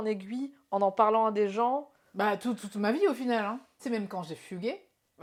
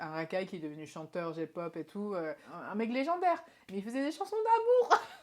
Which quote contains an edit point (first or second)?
second